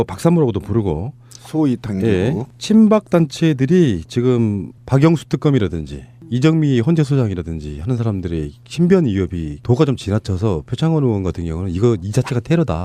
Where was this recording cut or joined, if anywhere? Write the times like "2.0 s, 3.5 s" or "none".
none